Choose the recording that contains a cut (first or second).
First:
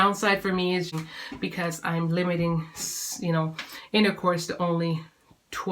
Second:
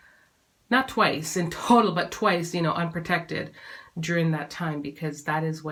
first